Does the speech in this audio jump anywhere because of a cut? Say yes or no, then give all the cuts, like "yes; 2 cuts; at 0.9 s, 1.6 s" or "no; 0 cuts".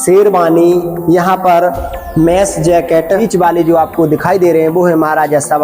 yes; 1 cut; at 3.1 s